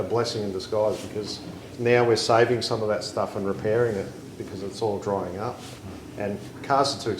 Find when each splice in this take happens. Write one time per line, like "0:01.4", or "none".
0:01.5